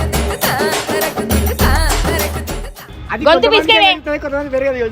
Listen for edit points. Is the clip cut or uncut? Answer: uncut